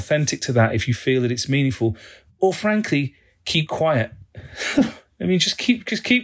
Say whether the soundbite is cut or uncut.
cut